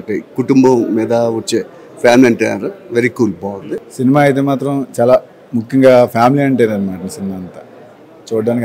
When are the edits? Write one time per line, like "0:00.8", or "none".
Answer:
0:03.8